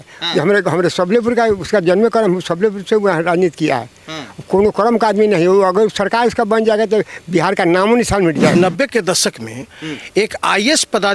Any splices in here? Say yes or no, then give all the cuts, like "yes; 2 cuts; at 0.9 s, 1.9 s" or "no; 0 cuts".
yes; 1 cut; at 8.6 s